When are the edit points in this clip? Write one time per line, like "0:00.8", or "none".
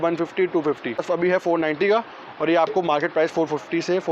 0:01.0